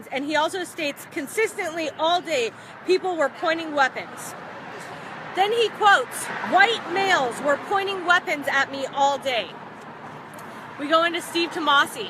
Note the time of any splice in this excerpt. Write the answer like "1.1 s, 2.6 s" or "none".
11.1 s